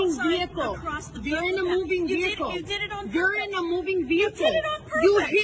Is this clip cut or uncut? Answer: uncut